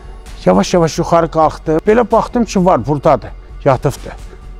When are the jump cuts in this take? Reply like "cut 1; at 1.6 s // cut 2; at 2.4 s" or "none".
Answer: cut 1; at 1.8 s